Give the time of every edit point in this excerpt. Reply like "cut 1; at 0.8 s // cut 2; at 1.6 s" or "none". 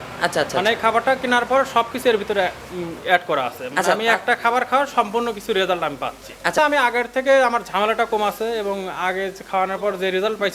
cut 1; at 6.6 s